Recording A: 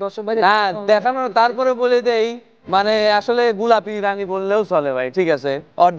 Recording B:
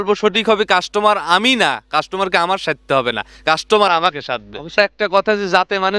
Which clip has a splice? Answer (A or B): B